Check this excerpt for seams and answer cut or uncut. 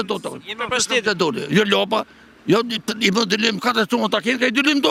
uncut